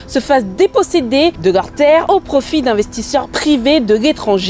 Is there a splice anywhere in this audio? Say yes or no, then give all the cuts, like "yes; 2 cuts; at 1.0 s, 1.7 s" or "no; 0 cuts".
no; 0 cuts